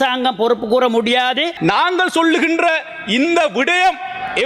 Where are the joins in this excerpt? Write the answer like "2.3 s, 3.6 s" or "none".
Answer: 1.5 s

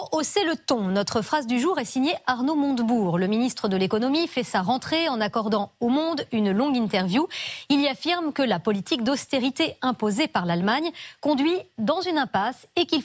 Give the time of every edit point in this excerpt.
2.9 s

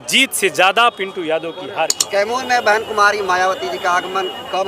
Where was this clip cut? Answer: 2.0 s

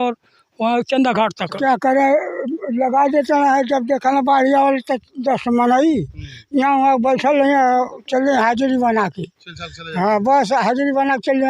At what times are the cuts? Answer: 1.6 s

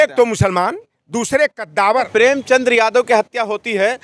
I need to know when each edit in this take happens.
2.1 s

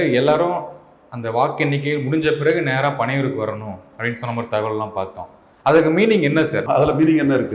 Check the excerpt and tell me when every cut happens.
6.6 s

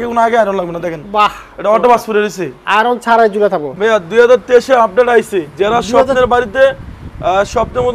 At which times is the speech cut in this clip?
3.7 s

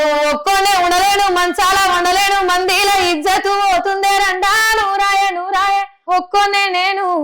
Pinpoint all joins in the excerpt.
5.9 s

